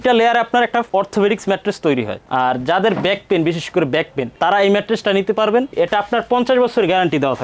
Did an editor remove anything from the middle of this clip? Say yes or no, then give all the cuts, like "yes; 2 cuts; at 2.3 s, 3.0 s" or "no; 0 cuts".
yes; 1 cut; at 5.7 s